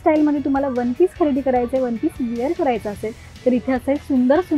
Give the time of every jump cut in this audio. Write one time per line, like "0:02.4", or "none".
none